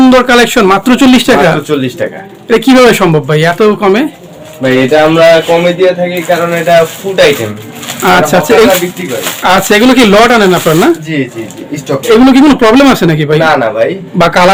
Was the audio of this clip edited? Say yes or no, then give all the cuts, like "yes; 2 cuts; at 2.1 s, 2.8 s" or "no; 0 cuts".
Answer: no; 0 cuts